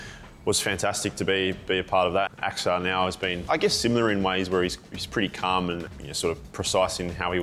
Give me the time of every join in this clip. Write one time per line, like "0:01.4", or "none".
0:02.3
0:03.4
0:05.9